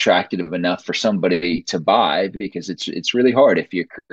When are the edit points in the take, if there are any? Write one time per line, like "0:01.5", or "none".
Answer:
none